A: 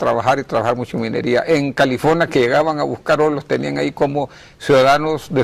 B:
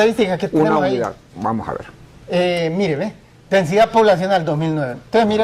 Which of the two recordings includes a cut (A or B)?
B